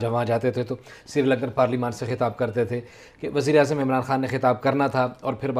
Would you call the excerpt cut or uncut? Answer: uncut